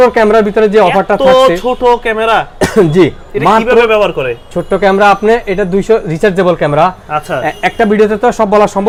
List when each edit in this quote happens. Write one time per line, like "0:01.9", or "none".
none